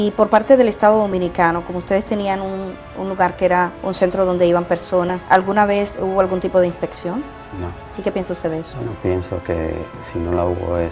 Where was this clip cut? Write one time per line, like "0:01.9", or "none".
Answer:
none

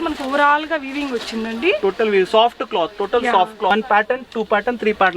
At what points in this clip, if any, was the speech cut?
0:03.7

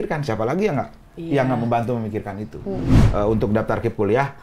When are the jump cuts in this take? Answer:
0:03.0

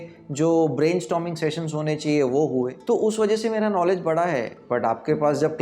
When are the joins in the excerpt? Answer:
0:02.8
0:04.6

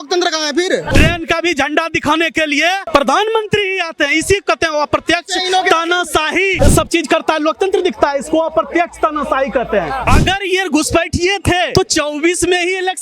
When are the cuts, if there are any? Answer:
0:00.9
0:02.8
0:06.5
0:10.0
0:11.7

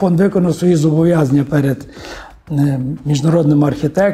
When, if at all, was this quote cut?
none

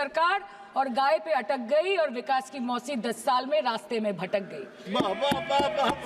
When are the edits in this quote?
none

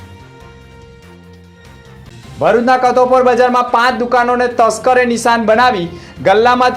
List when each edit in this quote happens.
none

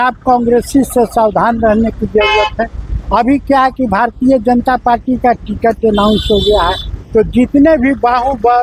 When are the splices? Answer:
none

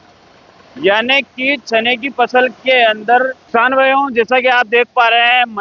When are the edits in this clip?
0:03.4

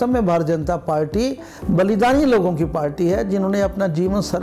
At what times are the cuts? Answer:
0:01.5

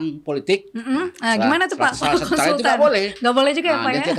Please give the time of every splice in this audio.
none

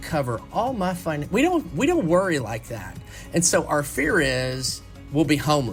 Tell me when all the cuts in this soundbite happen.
none

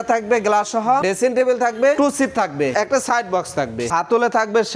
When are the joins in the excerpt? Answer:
0:01.0
0:02.5
0:03.9

